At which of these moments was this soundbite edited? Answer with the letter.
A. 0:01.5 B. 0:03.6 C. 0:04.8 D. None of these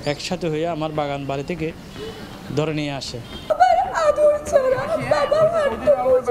B